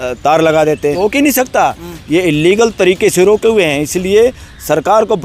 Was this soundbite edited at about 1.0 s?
yes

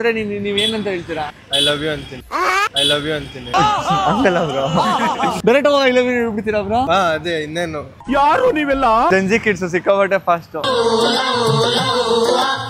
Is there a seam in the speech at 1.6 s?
no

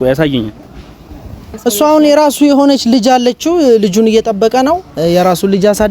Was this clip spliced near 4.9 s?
no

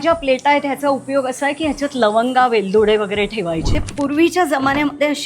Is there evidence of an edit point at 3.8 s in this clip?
yes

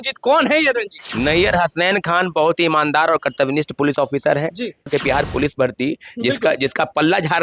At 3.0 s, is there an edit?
no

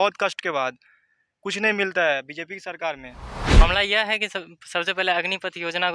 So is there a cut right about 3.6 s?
yes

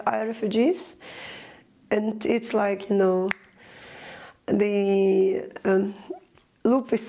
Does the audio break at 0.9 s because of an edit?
no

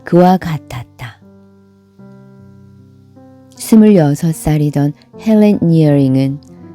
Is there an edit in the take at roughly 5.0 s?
no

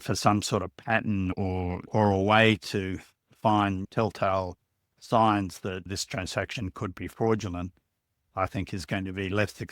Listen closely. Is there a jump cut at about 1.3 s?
yes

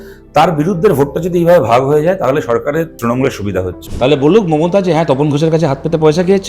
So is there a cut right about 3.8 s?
yes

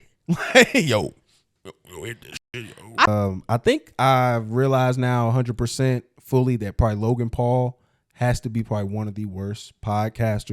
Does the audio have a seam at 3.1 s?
yes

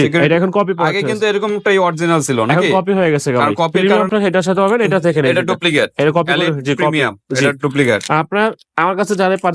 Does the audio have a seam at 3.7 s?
yes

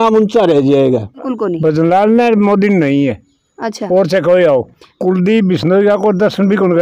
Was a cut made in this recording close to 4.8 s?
yes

